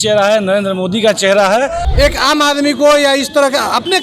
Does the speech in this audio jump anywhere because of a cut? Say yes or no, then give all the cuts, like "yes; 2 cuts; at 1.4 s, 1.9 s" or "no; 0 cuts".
yes; 1 cut; at 1.8 s